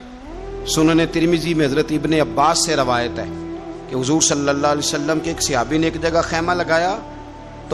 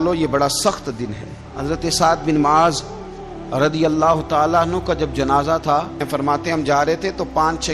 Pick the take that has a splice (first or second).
second